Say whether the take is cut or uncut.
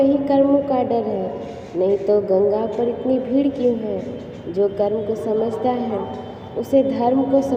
uncut